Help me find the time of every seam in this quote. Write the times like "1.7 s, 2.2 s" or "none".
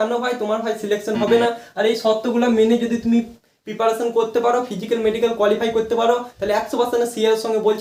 none